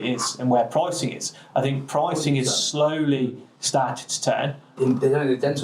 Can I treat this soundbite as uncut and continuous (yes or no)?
no